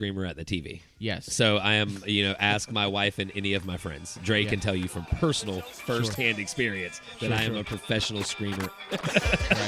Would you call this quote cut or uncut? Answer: cut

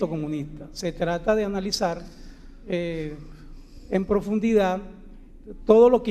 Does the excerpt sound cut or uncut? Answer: cut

